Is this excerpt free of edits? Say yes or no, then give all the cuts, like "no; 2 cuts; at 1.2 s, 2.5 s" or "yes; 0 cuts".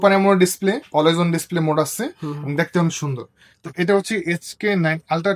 yes; 0 cuts